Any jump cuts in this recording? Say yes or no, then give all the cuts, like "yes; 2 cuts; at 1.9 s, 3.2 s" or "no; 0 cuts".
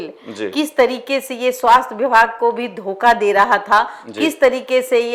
no; 0 cuts